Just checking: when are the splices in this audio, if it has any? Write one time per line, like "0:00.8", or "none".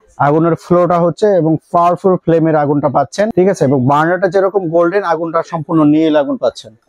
none